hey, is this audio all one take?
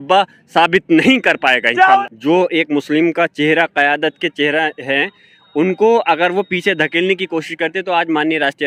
no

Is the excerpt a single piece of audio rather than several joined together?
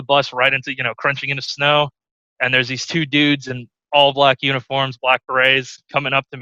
yes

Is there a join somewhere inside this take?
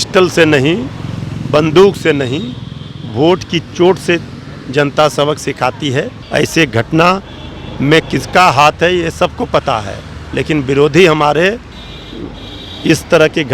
yes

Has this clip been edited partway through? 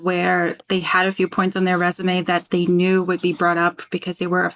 no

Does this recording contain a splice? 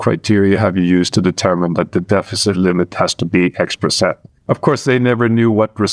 no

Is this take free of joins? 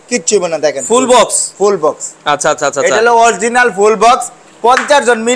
yes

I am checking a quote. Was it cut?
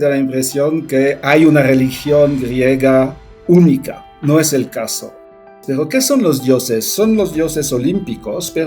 yes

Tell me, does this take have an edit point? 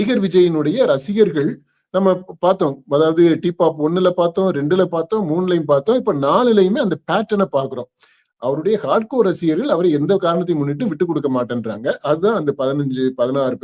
no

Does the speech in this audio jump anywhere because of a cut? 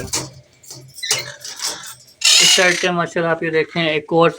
no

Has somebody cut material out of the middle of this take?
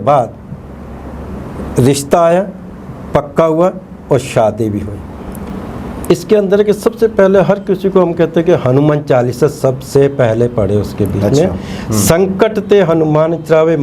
yes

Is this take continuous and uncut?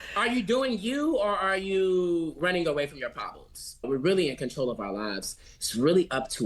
no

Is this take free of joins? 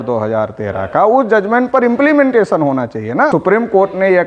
no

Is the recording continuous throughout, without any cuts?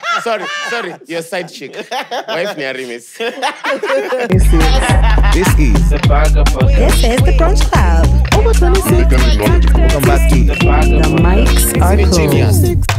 no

